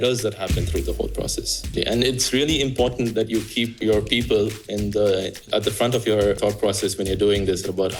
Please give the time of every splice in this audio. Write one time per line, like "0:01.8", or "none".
0:01.7
0:03.8
0:05.4
0:06.4

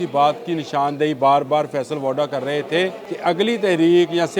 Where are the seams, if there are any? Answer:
0:03.1

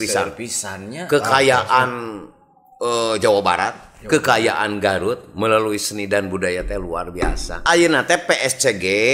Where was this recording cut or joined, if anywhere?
0:07.6

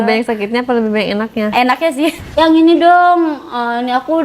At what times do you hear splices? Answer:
0:02.2

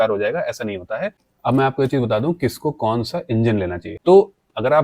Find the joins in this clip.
0:01.2
0:03.8

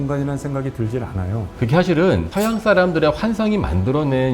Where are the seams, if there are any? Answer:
0:01.5

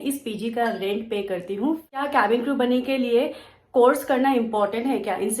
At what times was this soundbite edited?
0:02.1

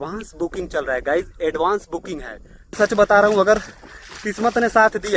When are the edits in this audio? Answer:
0:02.8

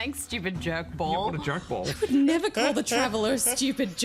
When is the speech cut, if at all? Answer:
0:02.0

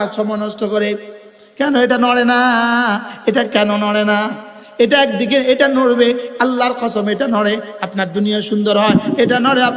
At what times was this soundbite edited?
none

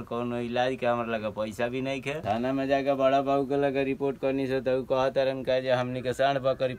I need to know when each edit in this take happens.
0:02.3

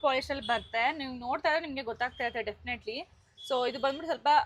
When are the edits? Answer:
none

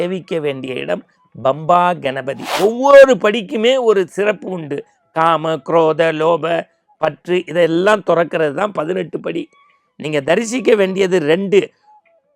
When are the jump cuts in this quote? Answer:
0:02.5

